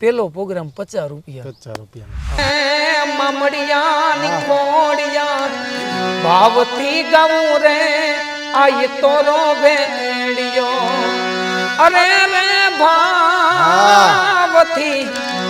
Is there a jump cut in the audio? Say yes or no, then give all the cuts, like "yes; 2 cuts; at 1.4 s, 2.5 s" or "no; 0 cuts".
yes; 1 cut; at 2.4 s